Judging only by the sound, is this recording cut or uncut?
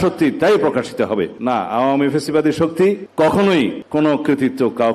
cut